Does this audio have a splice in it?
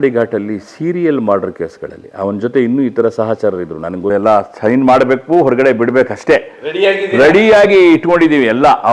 yes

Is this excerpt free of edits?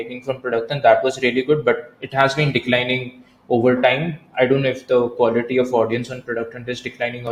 yes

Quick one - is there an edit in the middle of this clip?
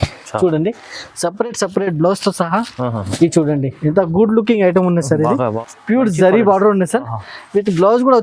yes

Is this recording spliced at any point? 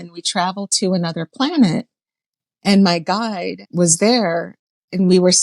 yes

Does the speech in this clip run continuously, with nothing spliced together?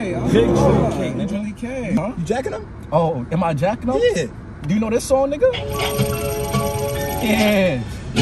no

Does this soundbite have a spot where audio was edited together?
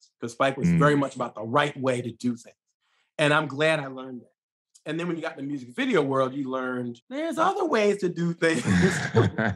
yes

